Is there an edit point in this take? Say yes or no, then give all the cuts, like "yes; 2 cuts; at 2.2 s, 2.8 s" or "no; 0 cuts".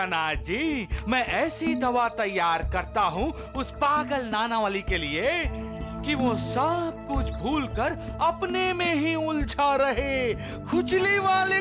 no; 0 cuts